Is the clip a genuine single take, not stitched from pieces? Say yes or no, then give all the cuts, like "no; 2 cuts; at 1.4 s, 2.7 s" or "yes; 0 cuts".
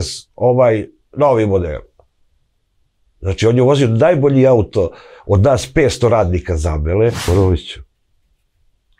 no; 1 cut; at 7.2 s